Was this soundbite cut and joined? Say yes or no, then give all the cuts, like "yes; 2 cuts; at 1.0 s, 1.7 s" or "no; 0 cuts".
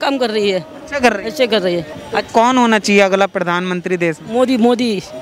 yes; 1 cut; at 1.9 s